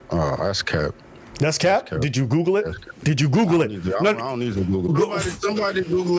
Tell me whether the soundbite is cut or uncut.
uncut